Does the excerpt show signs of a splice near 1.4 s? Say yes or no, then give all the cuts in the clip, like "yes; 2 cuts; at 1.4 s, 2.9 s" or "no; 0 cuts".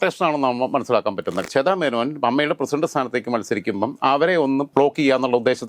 yes; 1 cut; at 1.4 s